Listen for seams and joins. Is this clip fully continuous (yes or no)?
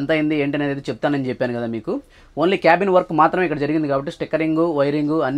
yes